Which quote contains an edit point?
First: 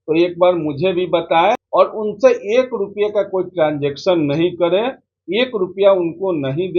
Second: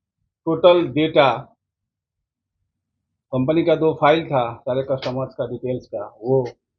first; 1 cut; at 1.6 s

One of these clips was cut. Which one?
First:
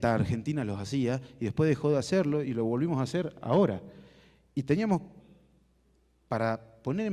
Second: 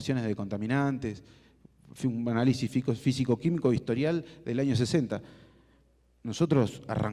first; 1 cut; at 1.8 s

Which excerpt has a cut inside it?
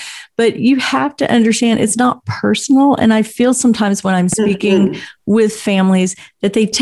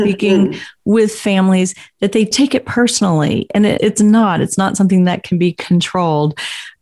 second; 1 cut; at 3.8 s

